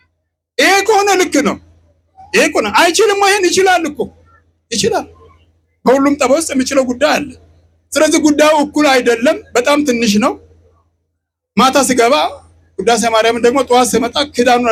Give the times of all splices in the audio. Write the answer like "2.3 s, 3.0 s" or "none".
none